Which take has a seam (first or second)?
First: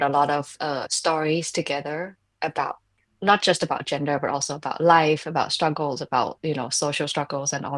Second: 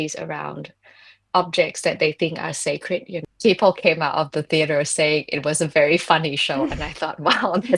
second